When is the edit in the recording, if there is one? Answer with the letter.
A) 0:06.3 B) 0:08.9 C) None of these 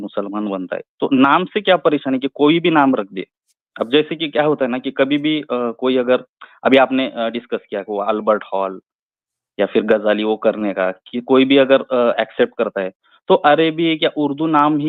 C